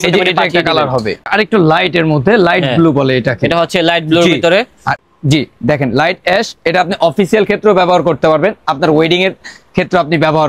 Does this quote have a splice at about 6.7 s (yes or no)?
no